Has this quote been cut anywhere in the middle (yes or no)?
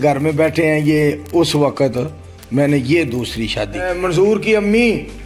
yes